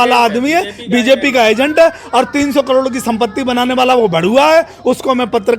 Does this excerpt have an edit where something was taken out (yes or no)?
no